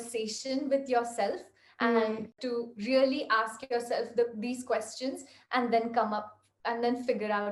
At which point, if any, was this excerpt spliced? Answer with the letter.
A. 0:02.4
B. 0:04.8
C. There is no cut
A